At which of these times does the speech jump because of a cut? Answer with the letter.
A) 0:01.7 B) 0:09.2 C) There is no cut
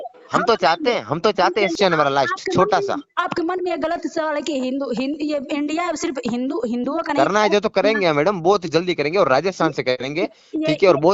A